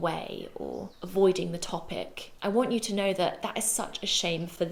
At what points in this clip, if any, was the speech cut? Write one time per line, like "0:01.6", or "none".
none